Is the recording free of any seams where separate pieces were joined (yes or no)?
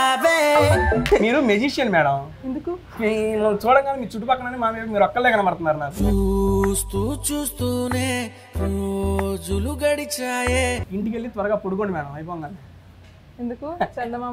no